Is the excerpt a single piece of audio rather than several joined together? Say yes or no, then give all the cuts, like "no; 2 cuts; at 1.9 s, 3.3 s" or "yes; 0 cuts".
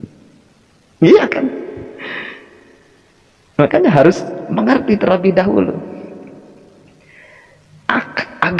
yes; 0 cuts